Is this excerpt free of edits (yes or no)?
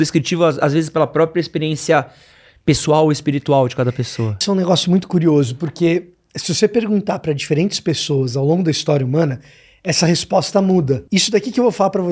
no